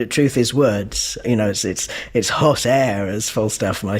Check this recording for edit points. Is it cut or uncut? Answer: cut